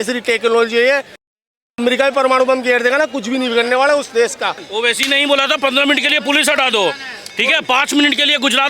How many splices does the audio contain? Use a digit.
1